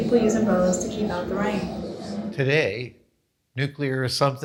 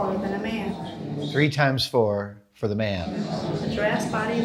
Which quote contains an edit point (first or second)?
second